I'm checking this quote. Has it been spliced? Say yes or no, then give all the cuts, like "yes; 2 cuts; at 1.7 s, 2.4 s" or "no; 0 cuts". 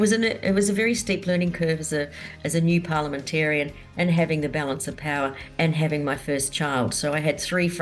no; 0 cuts